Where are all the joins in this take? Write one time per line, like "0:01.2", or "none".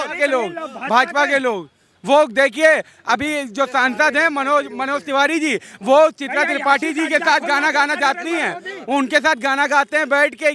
none